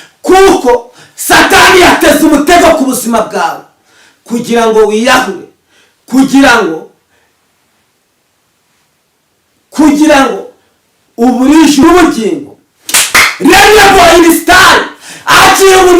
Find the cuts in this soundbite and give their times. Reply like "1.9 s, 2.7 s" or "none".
11.8 s